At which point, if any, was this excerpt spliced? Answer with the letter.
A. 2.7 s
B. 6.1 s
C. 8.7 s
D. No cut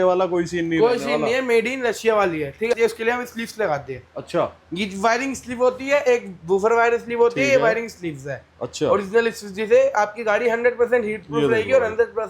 A